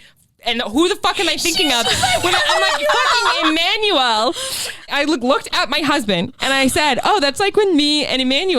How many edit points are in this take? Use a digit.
2